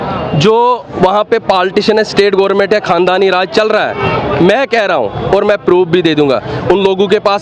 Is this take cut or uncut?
uncut